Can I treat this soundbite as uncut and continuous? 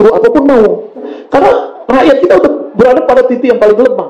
no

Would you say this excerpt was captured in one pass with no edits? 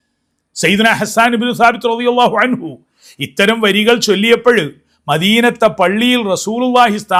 yes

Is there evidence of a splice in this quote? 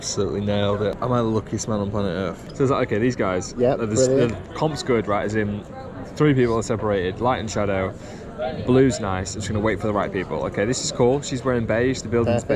yes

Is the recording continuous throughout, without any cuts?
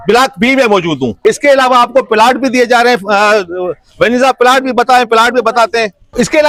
yes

